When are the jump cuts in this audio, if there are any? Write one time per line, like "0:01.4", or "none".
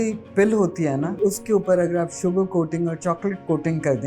0:01.1